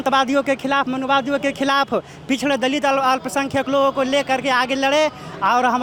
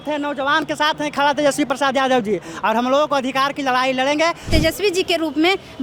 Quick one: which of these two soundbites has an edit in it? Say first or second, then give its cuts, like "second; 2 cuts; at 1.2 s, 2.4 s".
second; 1 cut; at 4.5 s